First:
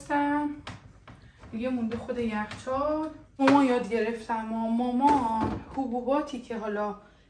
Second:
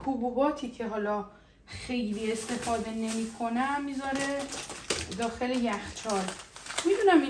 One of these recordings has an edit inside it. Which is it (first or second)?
first